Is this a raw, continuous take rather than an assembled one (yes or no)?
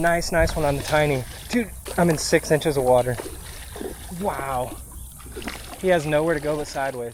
no